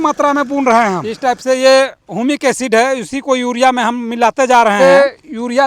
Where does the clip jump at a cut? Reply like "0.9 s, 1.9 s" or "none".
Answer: 1.1 s, 4.8 s